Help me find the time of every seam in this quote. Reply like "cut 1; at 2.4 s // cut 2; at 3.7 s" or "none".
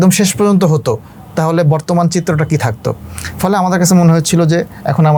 none